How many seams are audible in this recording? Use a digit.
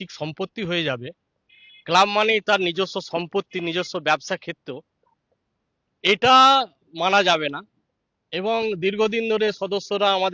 0